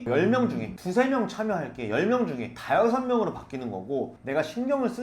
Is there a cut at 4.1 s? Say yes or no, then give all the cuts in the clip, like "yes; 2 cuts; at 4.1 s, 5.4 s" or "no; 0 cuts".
yes; 1 cut; at 4.1 s